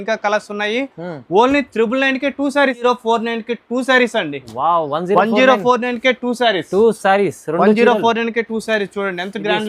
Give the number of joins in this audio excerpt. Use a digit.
1